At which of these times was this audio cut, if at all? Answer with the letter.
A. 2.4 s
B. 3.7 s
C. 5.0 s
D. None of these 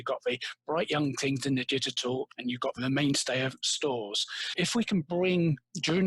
A